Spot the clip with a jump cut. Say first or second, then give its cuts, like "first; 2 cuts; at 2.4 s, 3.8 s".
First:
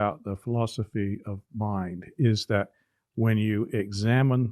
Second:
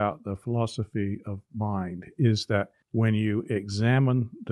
second; 1 cut; at 2.8 s